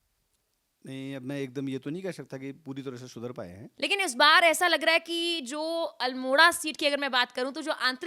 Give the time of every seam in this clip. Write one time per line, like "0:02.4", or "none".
0:03.6